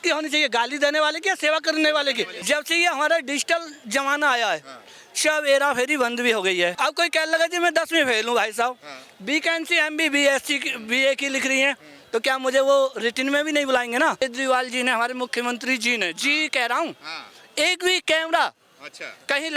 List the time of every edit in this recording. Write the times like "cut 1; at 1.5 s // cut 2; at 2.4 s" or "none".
cut 1; at 2.4 s // cut 2; at 6.8 s // cut 3; at 14.2 s